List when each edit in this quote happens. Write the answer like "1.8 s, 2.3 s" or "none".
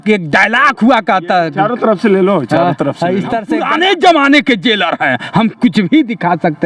3.5 s